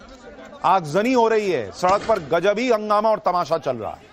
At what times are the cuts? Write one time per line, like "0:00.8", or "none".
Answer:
0:02.8